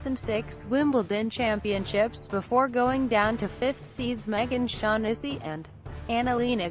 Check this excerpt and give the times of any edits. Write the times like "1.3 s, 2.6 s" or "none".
none